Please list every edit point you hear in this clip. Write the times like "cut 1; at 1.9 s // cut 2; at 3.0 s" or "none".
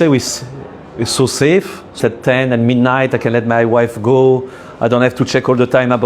cut 1; at 2.0 s